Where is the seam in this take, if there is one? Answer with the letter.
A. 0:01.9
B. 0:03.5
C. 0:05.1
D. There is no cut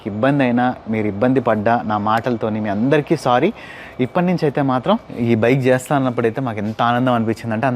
C